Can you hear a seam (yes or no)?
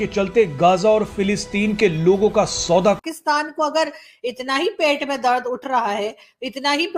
yes